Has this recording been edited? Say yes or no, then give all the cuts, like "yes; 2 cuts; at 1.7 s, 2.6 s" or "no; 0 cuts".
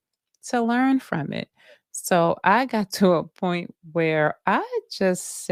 no; 0 cuts